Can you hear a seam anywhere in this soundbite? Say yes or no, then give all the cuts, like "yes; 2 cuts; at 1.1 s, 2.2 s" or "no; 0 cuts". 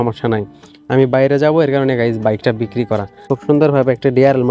yes; 1 cut; at 3.1 s